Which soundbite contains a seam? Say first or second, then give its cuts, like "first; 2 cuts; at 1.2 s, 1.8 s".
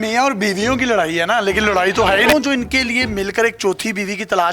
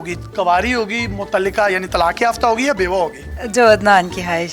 first; 1 cut; at 2.3 s